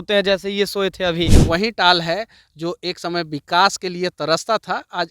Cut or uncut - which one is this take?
cut